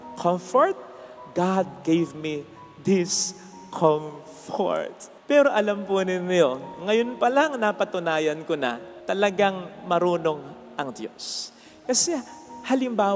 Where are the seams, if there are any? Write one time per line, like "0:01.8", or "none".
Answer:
none